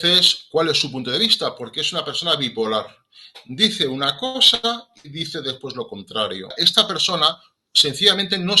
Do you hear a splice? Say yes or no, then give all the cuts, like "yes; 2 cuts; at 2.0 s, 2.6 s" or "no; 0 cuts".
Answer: yes; 1 cut; at 6.5 s